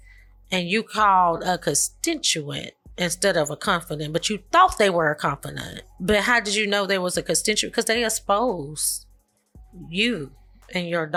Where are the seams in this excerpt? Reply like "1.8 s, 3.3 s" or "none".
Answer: none